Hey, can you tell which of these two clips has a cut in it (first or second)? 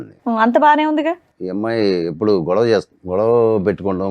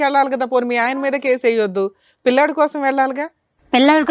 first